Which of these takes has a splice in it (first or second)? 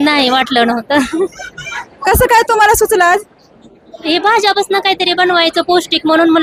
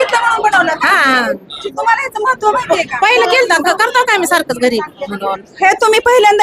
second